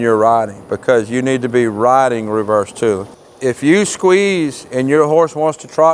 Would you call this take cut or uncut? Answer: cut